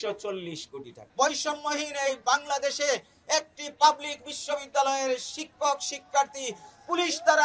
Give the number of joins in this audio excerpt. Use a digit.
1